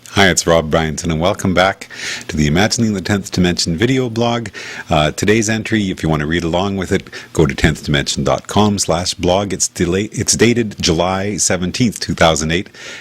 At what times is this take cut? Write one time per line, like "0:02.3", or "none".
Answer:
0:07.8